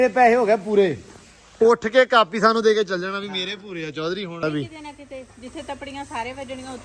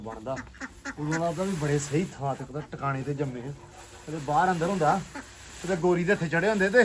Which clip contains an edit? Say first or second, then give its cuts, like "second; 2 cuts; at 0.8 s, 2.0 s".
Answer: first; 1 cut; at 4.4 s